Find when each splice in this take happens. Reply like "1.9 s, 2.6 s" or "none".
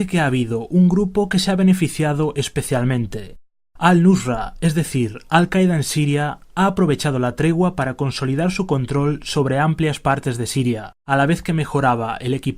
7.3 s